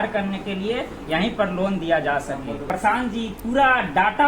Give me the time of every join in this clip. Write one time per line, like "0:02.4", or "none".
0:02.7